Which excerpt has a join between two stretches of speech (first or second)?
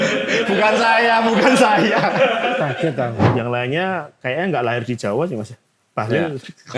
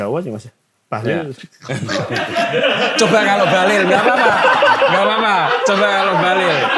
first